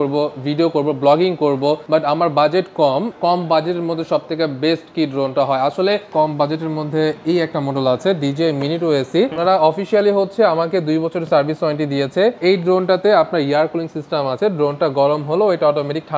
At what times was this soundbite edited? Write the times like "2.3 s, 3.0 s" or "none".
1.8 s, 3.1 s, 6.1 s, 9.4 s, 12.4 s